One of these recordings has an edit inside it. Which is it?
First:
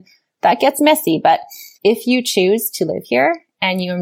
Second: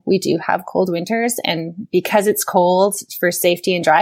first; 1 cut; at 1.6 s

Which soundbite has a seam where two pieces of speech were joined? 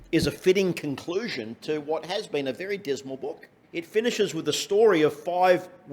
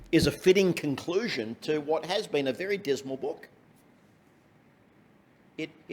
first; 1 cut; at 3.6 s

